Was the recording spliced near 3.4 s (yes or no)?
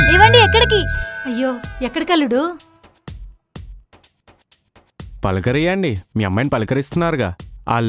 no